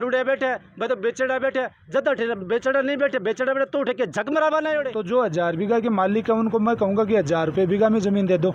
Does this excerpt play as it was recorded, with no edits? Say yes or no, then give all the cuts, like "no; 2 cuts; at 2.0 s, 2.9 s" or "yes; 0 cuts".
no; 1 cut; at 5.0 s